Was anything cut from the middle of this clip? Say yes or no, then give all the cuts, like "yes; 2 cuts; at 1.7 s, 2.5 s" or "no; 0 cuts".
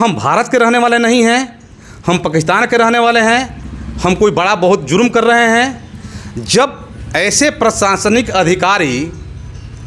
no; 0 cuts